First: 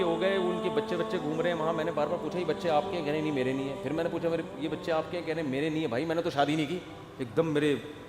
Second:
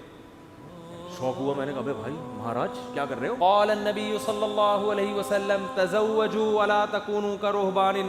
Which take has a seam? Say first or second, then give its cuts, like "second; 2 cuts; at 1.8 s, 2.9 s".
second; 1 cut; at 3.4 s